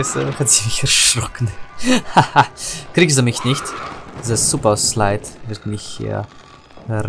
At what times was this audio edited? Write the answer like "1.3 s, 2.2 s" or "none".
none